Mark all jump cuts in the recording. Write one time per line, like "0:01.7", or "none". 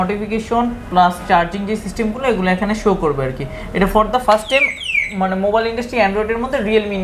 none